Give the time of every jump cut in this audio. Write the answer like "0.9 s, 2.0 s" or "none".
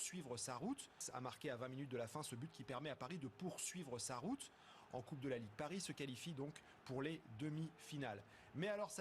0.9 s, 2.5 s